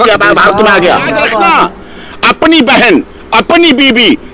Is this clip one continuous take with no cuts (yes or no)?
no